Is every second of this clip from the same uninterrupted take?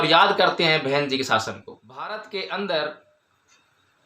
no; 1 cut; at 2.2 s

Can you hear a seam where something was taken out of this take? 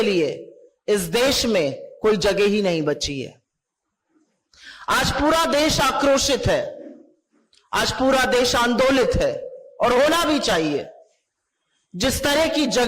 no; 0 cuts

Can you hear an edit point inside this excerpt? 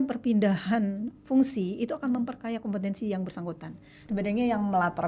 yes; 1 cut; at 4.0 s

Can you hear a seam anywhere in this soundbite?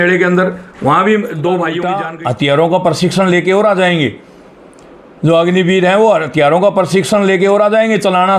yes; 1 cut; at 1.9 s

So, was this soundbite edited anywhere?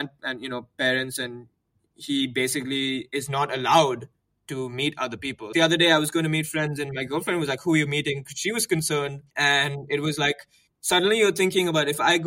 yes; 2 cuts; at 5.5 s, 9.2 s

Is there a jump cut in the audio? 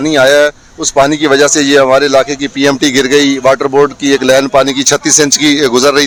no; 0 cuts

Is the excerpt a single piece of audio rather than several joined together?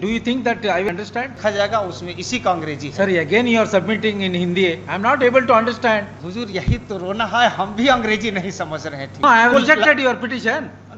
no; 3 cuts; at 0.9 s, 6.2 s, 9.2 s

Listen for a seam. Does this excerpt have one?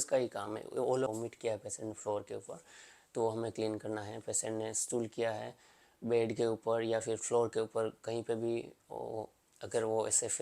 yes; 1 cut; at 1.1 s

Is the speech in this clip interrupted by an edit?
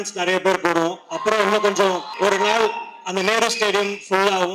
yes; 1 cut; at 2.1 s

